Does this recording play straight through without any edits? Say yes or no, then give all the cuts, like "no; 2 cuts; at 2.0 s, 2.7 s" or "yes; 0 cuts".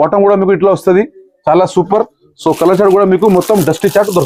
yes; 0 cuts